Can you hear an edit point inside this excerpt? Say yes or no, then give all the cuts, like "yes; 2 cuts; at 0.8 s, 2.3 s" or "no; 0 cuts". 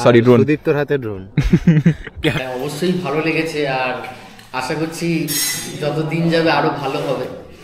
yes; 1 cut; at 2.4 s